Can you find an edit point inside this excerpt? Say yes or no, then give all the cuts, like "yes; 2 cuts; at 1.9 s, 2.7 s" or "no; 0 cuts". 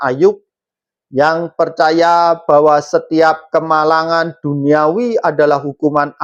no; 0 cuts